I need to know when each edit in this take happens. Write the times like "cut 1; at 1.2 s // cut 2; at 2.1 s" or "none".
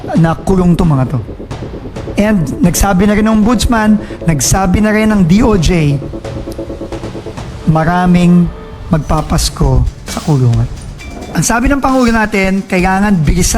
cut 1; at 11.2 s

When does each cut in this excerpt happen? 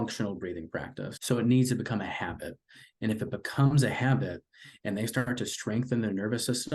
cut 1; at 1.1 s

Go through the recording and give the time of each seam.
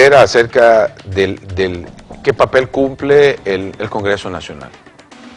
cut 1; at 2.9 s

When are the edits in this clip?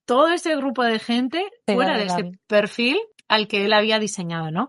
cut 1; at 3.2 s

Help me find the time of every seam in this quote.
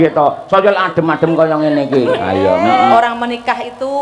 cut 1; at 2.9 s

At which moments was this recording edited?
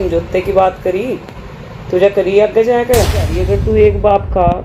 cut 1; at 3.5 s

